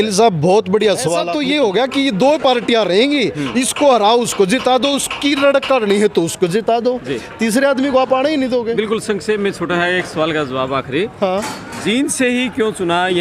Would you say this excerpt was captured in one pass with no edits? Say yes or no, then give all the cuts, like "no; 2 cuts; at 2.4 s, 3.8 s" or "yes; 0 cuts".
no; 1 cut; at 1.2 s